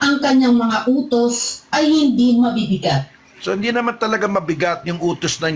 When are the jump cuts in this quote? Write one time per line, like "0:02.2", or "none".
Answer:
none